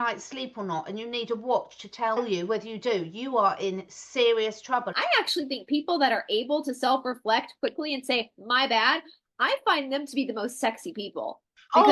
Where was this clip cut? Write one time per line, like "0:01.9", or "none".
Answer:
0:02.2
0:05.0

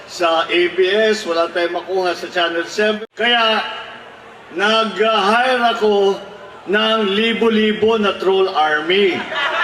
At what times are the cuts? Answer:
0:03.0

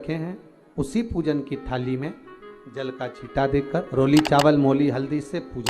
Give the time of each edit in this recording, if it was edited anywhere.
0:03.9

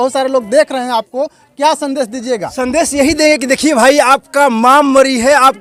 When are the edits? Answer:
none

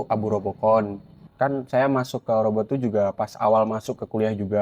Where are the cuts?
0:01.2

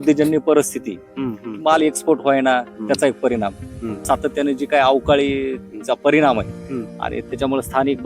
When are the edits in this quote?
0:04.0

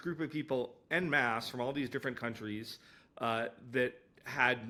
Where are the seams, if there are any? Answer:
none

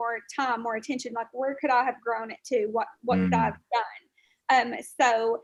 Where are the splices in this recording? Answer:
none

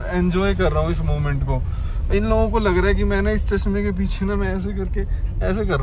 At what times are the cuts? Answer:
none

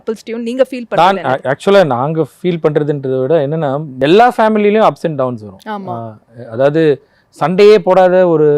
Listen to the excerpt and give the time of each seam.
0:03.9

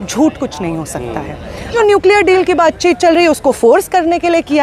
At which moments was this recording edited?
0:01.7

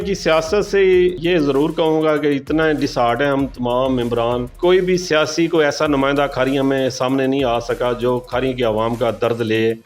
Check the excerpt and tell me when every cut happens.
0:01.2

